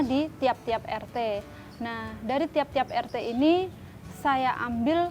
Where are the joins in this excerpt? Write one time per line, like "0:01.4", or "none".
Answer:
none